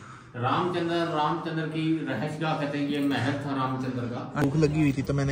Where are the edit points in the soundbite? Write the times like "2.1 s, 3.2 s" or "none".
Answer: 4.3 s